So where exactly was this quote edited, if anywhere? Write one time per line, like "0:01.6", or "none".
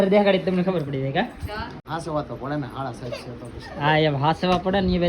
0:01.7